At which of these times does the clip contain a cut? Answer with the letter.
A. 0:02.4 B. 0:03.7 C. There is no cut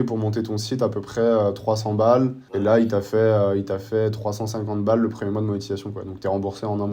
A